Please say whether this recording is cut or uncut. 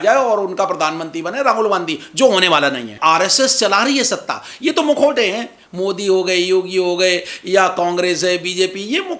cut